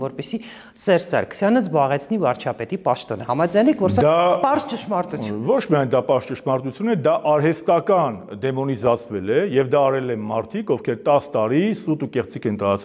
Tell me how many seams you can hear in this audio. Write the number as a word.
zero